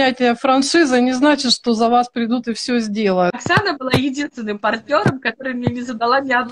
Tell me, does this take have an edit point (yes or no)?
yes